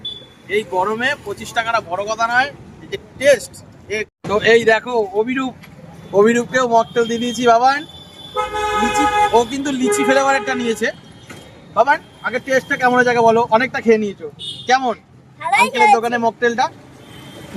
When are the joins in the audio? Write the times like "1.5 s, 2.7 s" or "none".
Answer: 4.2 s